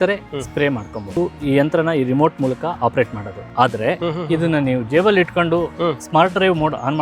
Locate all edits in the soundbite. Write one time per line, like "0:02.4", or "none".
0:01.1
0:04.0